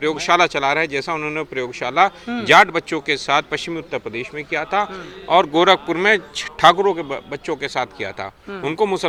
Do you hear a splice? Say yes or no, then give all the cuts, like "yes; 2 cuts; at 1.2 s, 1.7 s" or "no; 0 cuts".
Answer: no; 0 cuts